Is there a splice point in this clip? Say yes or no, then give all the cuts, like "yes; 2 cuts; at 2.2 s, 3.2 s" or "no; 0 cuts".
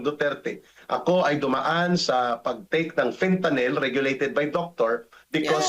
no; 0 cuts